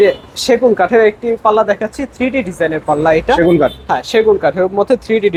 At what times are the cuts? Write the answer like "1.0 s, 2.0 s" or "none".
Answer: none